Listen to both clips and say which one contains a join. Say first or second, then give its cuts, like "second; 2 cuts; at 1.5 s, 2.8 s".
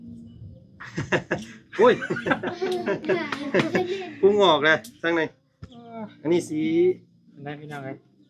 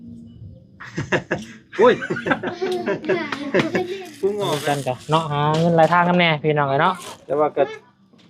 second; 1 cut; at 4.5 s